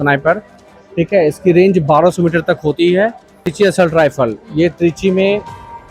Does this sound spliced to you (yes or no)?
yes